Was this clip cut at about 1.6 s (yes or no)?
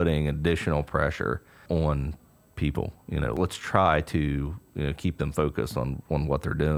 yes